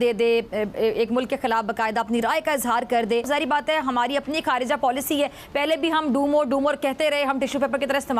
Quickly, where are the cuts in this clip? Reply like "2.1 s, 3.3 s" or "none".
3.3 s

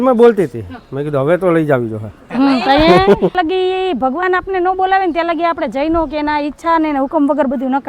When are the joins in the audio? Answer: 3.3 s

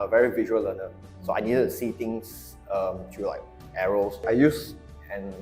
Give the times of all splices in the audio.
4.3 s

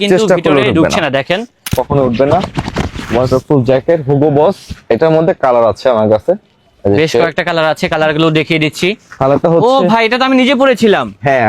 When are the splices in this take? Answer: 1.7 s

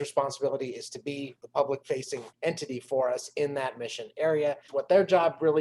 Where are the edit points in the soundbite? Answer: 1.4 s, 2.3 s, 4.7 s

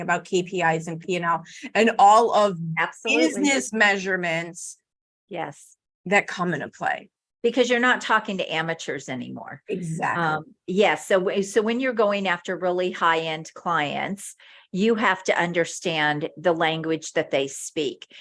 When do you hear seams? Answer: none

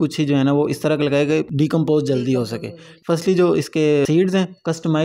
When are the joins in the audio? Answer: 1.5 s, 2.9 s, 4.1 s

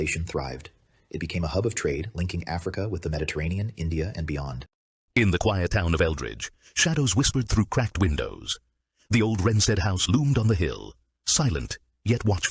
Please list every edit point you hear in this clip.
4.9 s

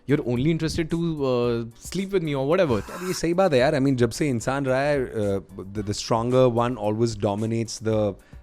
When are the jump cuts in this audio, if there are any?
2.8 s

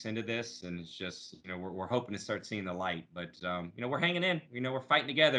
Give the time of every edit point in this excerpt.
none

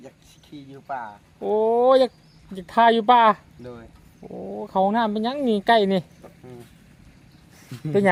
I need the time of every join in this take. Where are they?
none

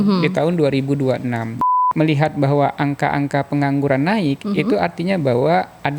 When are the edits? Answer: 1.6 s

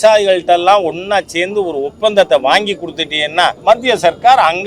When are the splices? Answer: 3.6 s

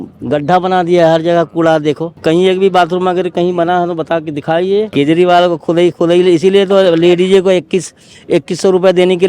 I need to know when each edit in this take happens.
2.1 s, 4.9 s

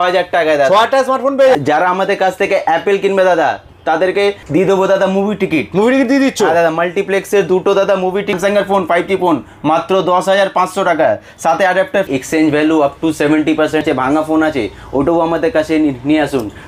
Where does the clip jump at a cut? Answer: 1.6 s, 8.3 s, 12.1 s, 13.8 s

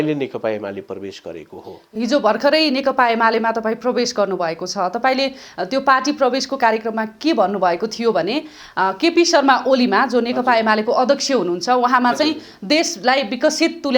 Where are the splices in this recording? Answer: none

